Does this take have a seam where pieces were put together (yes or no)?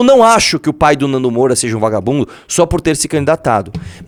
no